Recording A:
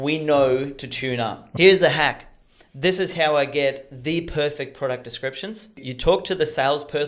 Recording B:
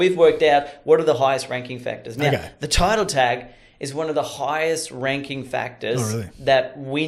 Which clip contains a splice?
A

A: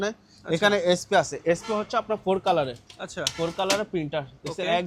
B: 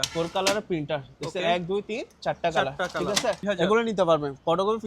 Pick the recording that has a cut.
B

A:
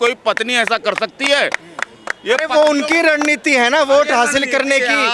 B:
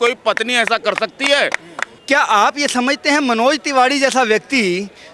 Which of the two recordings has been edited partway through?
B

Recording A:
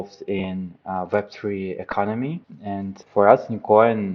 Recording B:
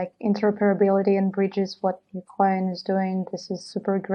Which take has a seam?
A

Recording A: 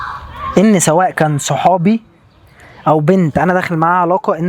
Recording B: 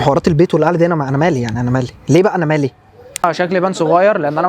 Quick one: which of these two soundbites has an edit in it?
B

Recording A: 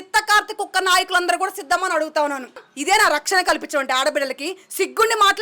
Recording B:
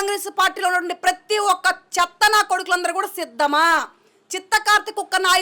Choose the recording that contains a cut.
A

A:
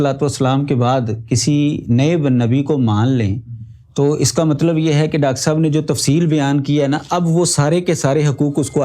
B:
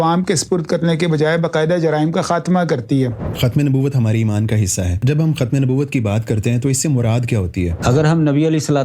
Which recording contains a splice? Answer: B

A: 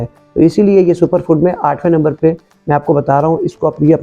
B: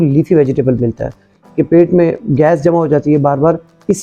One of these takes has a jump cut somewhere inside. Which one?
B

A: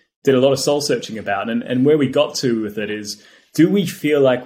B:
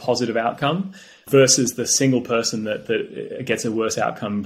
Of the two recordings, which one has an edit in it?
B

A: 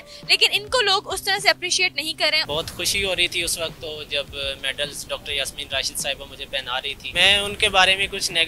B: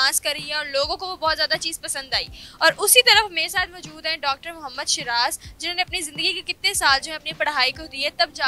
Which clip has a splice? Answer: A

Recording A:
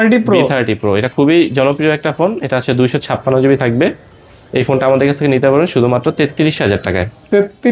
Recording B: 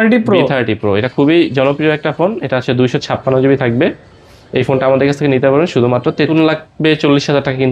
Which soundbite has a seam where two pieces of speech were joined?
B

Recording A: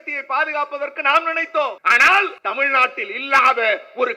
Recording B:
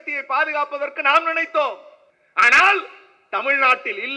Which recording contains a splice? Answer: A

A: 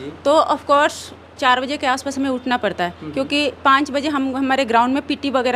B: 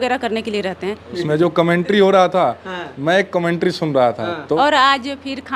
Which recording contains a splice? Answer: B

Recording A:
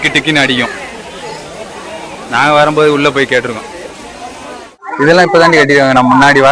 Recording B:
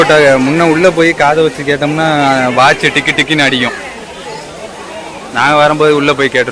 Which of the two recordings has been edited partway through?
A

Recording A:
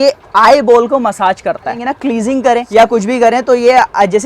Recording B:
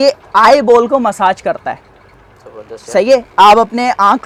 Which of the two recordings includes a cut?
A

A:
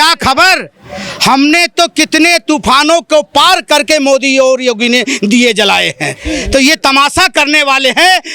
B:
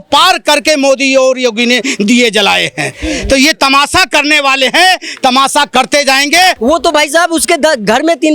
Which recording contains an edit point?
B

